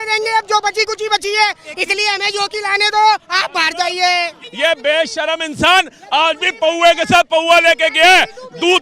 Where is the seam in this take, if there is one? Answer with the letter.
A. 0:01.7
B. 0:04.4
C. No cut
B